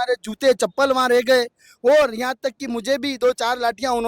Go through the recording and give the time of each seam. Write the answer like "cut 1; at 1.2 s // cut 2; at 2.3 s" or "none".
cut 1; at 3.1 s